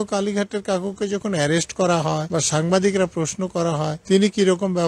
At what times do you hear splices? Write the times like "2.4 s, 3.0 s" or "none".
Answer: 2.2 s, 4.0 s

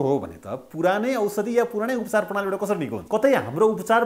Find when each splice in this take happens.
3.0 s

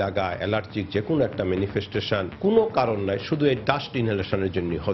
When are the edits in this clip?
2.3 s

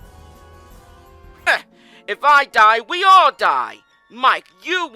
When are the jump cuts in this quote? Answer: 1.5 s

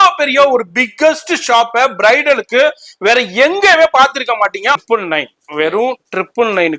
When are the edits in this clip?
4.8 s

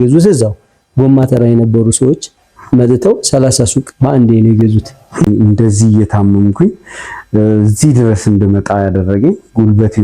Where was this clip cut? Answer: 5.3 s

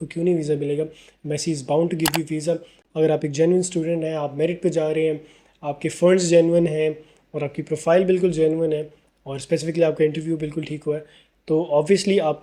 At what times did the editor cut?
none

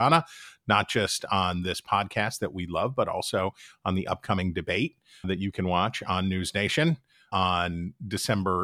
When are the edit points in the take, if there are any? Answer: 5.3 s, 7.3 s

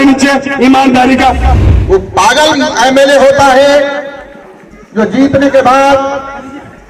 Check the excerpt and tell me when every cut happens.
1.5 s

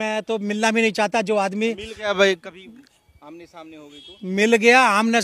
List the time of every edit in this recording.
none

